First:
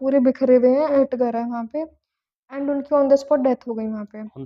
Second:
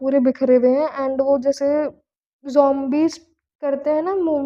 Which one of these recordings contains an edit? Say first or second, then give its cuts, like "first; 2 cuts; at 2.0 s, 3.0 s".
first; 1 cut; at 0.9 s